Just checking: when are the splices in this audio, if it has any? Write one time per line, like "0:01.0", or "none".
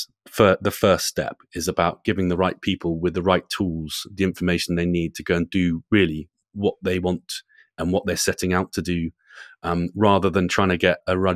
none